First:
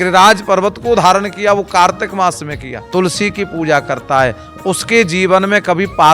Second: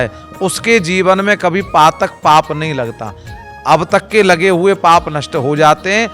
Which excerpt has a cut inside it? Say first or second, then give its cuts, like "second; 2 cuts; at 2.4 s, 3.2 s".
first; 1 cut; at 2.8 s